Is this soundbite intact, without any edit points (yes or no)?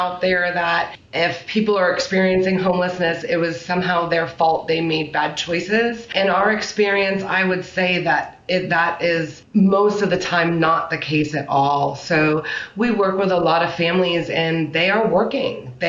no